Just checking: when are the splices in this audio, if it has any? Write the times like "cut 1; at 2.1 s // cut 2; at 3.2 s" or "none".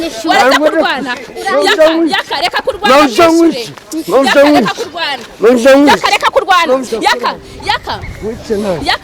cut 1; at 6.9 s